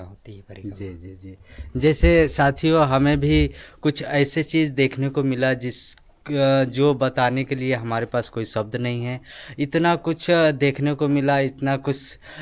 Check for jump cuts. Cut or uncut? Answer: uncut